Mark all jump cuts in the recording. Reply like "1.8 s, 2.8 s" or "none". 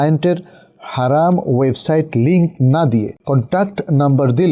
3.2 s